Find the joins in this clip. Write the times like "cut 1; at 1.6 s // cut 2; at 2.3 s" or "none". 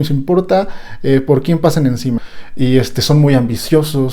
cut 1; at 2.4 s